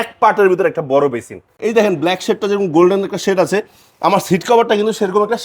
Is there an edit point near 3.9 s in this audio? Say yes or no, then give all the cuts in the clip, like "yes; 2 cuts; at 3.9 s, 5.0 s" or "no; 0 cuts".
no; 1 cut; at 1.5 s